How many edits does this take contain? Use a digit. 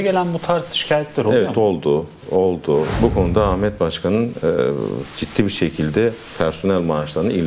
1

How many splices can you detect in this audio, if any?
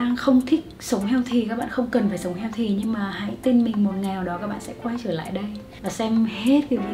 1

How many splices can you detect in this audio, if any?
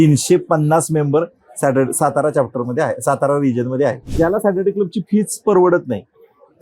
1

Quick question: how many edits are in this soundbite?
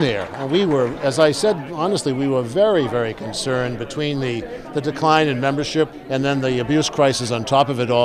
1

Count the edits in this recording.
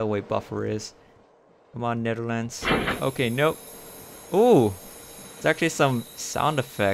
0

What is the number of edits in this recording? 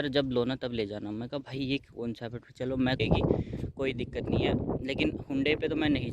1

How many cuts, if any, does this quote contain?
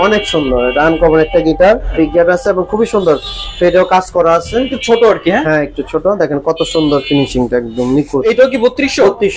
3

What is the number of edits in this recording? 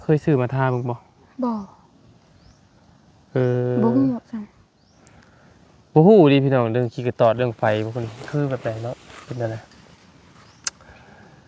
0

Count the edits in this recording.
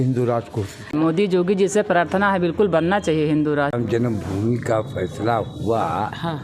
2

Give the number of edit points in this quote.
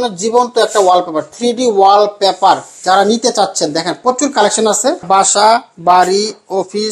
1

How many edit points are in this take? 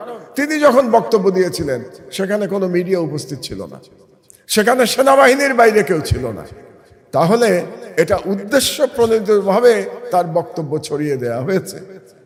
0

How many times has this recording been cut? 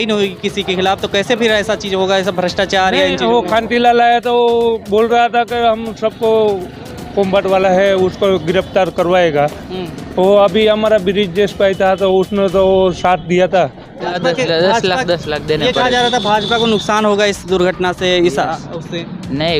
1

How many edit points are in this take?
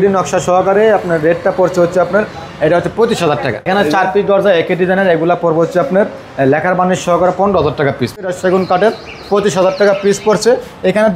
2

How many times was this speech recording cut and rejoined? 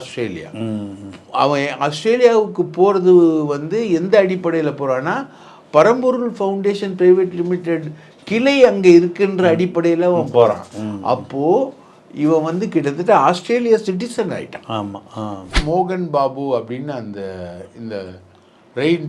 1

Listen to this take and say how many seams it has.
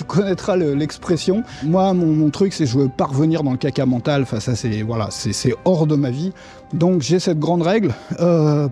1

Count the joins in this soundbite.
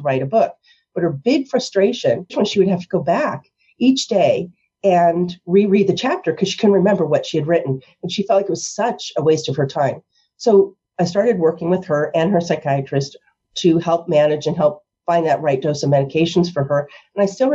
1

